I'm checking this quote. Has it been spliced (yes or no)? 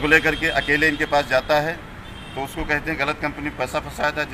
no